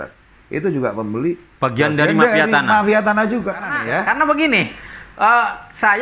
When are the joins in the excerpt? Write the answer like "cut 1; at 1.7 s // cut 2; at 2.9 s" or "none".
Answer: cut 1; at 3.7 s